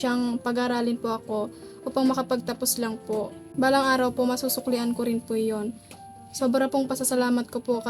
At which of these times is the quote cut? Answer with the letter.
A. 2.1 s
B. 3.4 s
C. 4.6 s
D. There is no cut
B